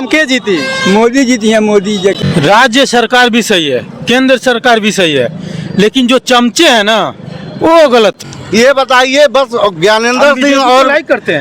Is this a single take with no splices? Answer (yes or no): no